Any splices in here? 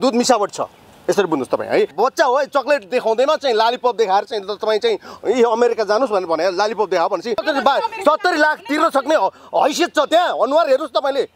yes; 2 cuts; at 1.9 s, 7.4 s

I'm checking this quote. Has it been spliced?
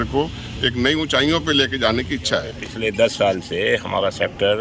yes; 1 cut; at 2.6 s

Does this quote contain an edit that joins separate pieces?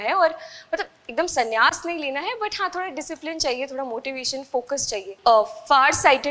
yes; 1 cut; at 5.1 s

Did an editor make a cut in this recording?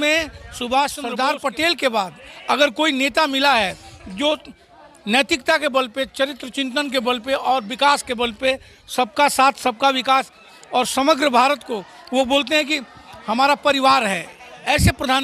yes; 1 cut; at 1.0 s

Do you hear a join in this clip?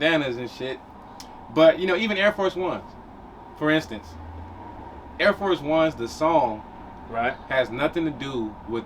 no; 0 cuts

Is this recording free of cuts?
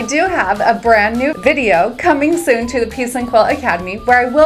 no; 1 cut; at 1.3 s

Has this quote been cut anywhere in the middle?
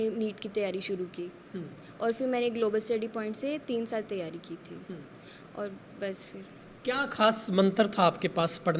no; 0 cuts

